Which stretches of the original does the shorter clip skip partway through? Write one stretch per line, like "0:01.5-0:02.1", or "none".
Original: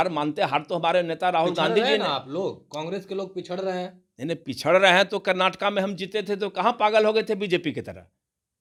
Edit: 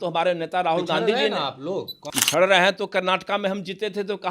0:02.8-0:04.4